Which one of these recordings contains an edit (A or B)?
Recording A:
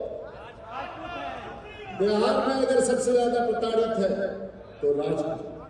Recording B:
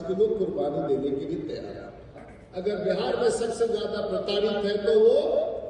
B